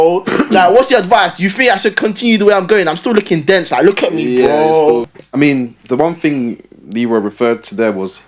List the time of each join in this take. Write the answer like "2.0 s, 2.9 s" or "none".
5.1 s

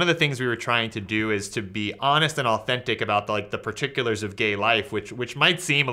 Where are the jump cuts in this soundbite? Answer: none

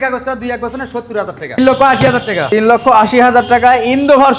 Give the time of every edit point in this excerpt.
1.6 s, 2.4 s

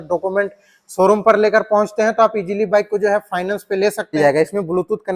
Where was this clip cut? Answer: 4.1 s

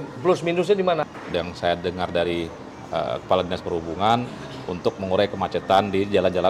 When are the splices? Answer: 1.0 s

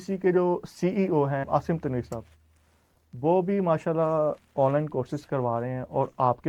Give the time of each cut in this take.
none

